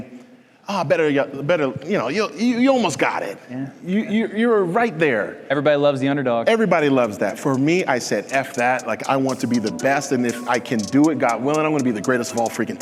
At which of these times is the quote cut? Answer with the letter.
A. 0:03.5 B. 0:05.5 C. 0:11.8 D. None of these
D